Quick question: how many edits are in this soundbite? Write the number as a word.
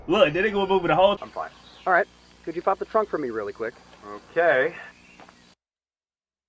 one